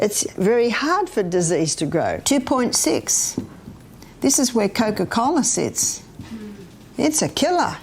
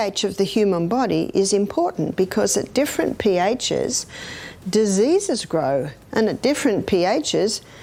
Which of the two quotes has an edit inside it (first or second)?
first